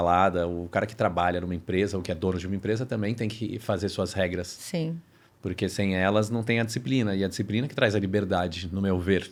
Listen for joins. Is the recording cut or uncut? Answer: uncut